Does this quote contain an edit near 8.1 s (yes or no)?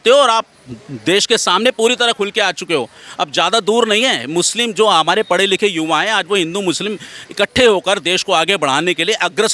no